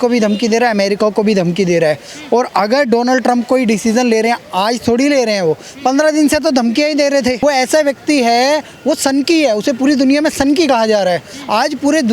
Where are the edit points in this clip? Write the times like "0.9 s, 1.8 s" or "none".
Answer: 7.4 s